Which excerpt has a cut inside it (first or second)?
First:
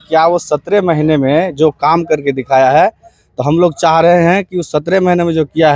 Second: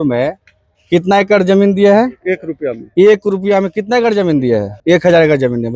second